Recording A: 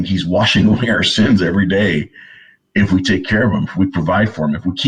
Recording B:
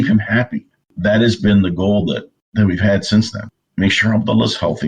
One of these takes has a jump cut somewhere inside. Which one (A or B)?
B